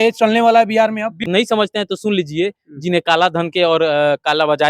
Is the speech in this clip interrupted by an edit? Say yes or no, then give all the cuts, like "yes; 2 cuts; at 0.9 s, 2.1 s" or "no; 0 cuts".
yes; 1 cut; at 1.3 s